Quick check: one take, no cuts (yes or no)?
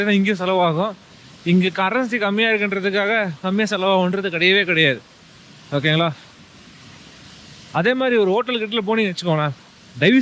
yes